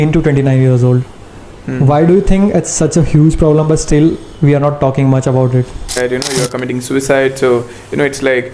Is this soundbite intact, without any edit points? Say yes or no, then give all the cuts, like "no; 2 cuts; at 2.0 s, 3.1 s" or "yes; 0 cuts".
no; 1 cut; at 6.0 s